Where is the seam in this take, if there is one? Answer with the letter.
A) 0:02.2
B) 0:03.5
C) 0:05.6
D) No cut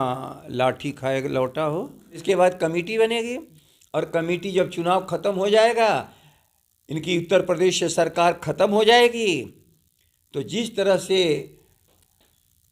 A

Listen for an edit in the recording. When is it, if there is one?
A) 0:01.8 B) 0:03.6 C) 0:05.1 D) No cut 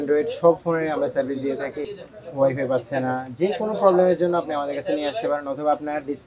A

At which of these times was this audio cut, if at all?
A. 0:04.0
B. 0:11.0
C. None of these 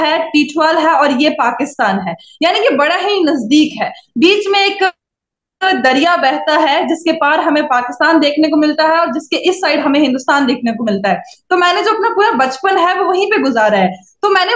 C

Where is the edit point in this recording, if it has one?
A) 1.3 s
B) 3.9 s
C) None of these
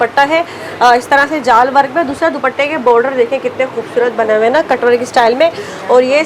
C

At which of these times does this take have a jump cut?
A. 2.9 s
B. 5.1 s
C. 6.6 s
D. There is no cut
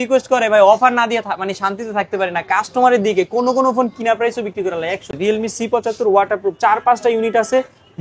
B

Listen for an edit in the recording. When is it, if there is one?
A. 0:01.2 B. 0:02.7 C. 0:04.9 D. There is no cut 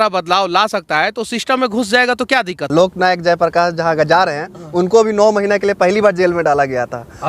B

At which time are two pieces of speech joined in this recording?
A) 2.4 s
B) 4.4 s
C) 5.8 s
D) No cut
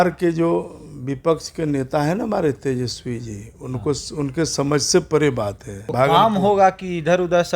C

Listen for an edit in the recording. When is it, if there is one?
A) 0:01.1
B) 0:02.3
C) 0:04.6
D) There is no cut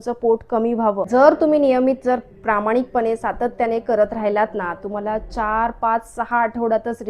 A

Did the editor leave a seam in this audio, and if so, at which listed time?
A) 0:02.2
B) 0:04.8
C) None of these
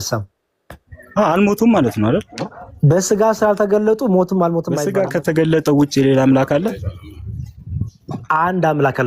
B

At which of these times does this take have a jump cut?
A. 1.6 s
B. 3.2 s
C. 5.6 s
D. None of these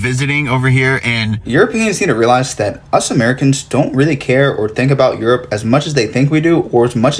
A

